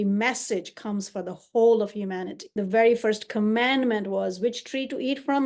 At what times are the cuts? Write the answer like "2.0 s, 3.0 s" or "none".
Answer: 2.4 s